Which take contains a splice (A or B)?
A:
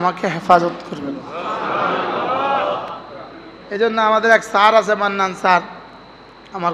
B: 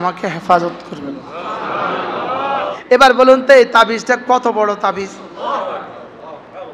B